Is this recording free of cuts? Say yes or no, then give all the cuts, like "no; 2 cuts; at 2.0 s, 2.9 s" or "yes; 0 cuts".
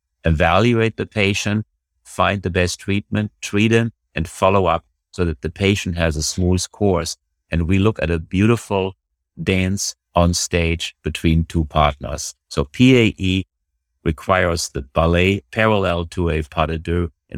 yes; 0 cuts